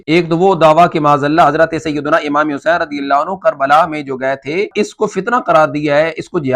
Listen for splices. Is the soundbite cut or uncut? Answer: cut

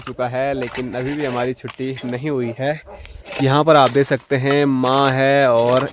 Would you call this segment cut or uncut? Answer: uncut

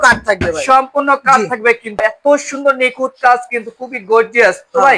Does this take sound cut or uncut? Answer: cut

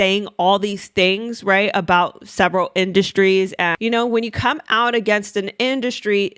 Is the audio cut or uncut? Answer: cut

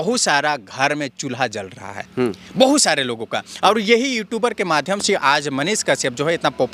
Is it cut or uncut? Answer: uncut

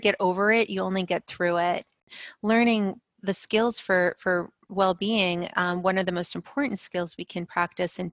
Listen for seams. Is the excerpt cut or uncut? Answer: cut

